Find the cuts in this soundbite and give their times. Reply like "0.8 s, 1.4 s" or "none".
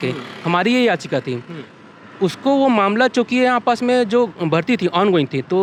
none